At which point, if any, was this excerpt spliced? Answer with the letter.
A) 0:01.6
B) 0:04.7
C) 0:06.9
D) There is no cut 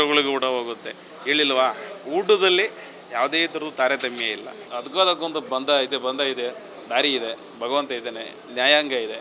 B